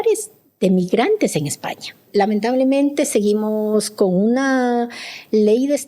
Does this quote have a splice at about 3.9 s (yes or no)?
no